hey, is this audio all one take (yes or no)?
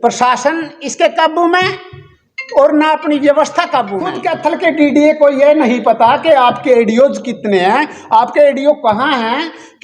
no